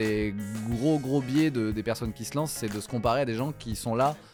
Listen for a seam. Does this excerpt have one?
no; 0 cuts

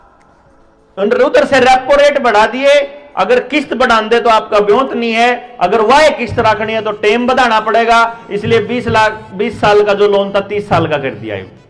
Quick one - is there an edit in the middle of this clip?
no; 0 cuts

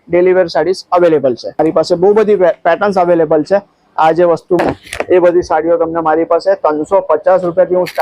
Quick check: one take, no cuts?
no; 2 cuts; at 1.6 s, 4.6 s

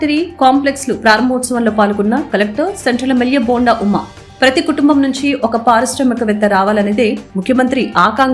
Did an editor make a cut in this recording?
no; 0 cuts

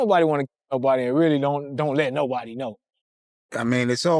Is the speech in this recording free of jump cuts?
no; 1 cut; at 2.9 s

